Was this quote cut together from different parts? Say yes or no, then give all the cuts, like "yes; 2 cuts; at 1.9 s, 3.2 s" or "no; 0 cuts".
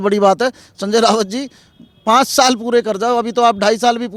no; 0 cuts